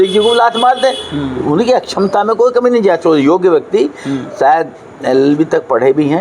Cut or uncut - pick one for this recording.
uncut